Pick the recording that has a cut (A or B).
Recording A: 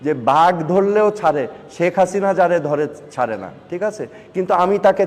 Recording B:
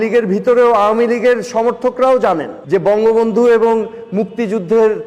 B